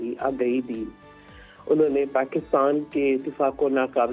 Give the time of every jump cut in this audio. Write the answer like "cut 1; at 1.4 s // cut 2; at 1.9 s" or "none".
none